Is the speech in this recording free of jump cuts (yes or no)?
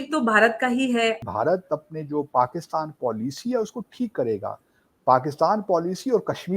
no